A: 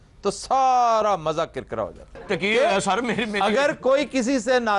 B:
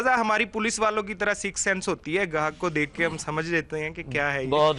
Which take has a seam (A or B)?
A